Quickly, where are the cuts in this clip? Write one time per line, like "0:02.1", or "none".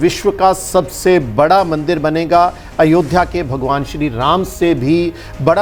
none